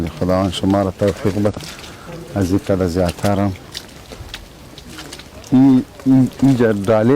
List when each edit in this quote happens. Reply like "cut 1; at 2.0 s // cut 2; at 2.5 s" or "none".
cut 1; at 1.6 s